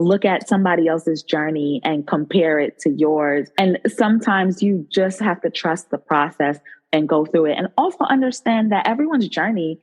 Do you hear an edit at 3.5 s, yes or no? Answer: yes